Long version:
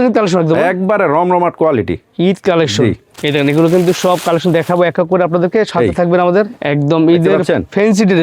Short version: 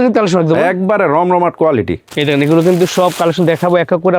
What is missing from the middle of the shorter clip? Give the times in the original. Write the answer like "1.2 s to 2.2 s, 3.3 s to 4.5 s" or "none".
2.0 s to 3.1 s